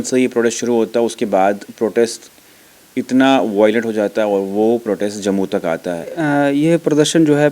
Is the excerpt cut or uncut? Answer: cut